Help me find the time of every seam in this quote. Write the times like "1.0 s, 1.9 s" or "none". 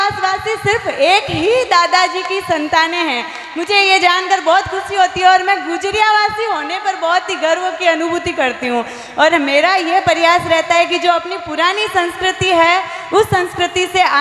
none

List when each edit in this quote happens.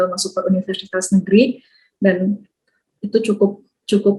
none

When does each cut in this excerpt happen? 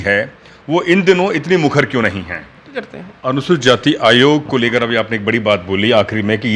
2.9 s

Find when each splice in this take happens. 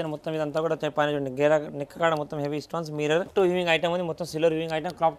3.3 s

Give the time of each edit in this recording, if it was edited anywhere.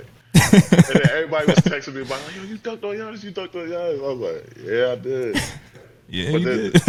none

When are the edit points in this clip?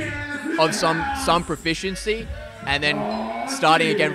none

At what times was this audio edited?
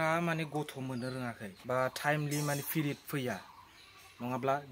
1.5 s

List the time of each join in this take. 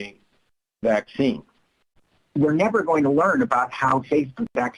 2.0 s

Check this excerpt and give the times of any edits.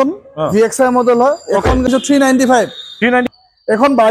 1.9 s, 3.3 s

